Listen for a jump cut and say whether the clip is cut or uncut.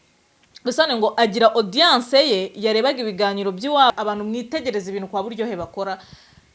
cut